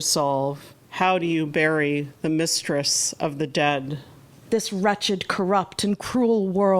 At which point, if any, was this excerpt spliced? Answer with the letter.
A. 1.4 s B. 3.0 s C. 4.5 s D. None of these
C